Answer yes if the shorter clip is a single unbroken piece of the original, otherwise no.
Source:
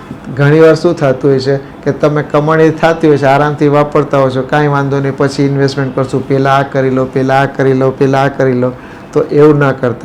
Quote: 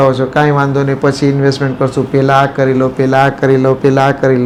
yes